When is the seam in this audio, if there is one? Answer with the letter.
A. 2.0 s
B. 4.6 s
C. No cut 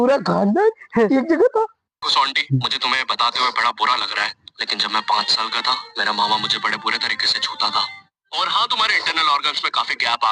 A